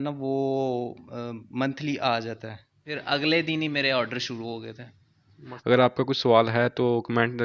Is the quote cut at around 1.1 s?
no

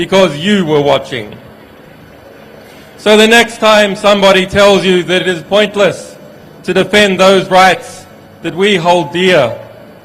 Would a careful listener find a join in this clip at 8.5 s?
no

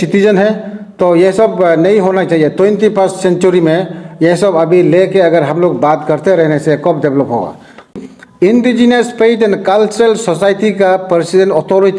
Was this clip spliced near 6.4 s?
no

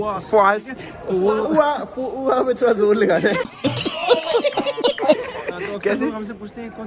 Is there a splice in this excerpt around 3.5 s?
no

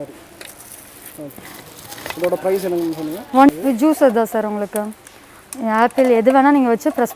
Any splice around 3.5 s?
yes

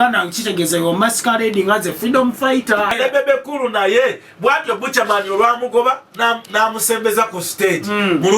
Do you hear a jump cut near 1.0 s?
no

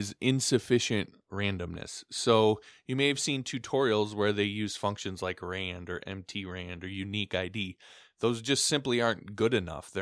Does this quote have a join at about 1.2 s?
yes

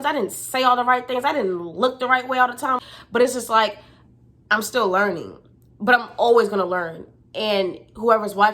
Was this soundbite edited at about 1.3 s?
no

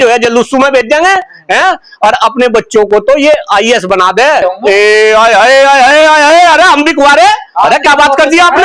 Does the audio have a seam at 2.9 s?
no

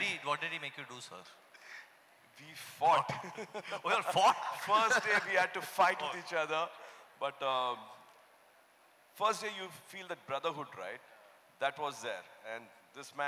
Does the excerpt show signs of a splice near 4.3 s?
no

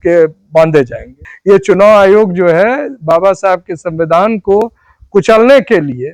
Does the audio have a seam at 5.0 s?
no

